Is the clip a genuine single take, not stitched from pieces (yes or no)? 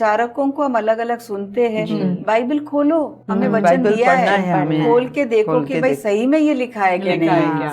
yes